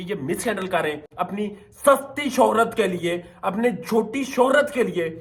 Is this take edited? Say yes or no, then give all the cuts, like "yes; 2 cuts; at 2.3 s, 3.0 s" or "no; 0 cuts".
no; 0 cuts